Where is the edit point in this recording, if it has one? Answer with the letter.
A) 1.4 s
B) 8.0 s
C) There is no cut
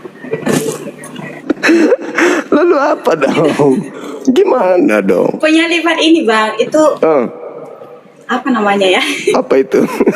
A